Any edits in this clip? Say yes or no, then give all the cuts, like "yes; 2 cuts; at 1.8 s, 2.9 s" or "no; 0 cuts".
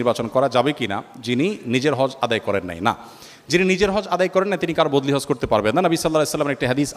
no; 0 cuts